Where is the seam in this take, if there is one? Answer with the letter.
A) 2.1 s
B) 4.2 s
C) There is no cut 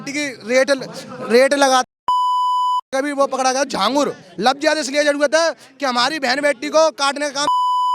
B